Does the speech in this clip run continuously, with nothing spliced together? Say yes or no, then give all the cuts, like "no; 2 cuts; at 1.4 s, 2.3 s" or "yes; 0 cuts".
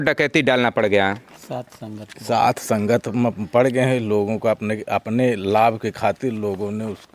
yes; 0 cuts